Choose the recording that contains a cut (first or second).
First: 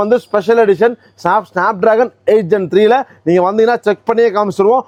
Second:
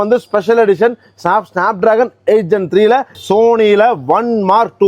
second